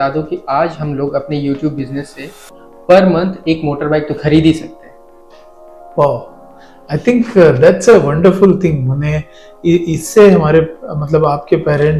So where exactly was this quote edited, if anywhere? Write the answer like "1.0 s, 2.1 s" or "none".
none